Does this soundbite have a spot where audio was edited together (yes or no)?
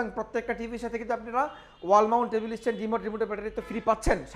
no